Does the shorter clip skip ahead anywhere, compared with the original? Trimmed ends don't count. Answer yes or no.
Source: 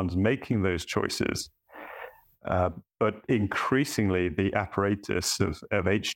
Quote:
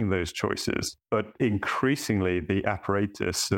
yes